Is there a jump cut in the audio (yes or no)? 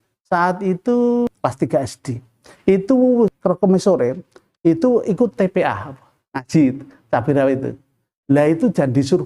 yes